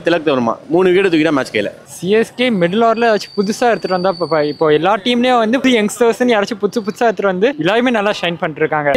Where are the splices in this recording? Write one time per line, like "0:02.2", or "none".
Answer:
none